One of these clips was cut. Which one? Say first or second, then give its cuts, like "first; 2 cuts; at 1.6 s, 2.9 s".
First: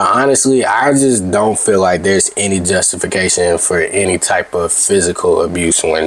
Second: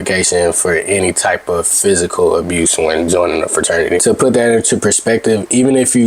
second; 1 cut; at 4.0 s